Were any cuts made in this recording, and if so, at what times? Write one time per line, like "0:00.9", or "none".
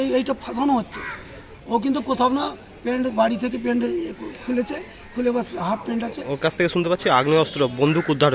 none